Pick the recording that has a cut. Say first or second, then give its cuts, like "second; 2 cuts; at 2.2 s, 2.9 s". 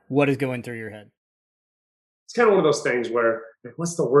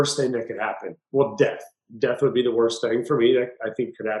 first; 1 cut; at 1.5 s